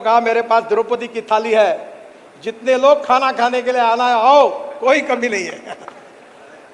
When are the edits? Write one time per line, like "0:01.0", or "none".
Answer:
none